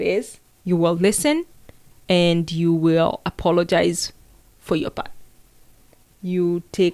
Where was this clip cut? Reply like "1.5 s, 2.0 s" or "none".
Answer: none